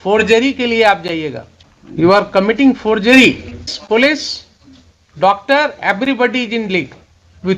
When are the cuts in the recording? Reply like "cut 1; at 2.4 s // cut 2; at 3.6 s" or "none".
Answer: cut 1; at 2.1 s // cut 2; at 3.8 s